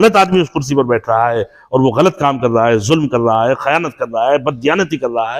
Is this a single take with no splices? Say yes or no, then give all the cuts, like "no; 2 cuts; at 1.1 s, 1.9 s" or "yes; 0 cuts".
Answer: yes; 0 cuts